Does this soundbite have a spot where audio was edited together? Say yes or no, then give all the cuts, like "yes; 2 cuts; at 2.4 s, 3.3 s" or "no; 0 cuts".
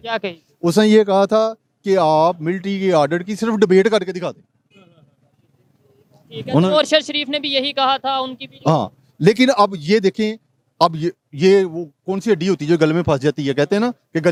no; 0 cuts